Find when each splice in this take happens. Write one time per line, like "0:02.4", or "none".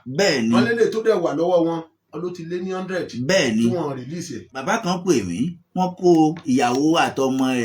0:04.5